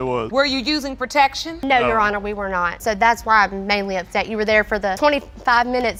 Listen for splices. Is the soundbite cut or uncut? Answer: uncut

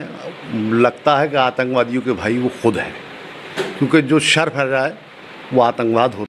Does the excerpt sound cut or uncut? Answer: uncut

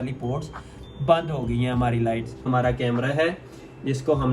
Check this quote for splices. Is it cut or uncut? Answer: cut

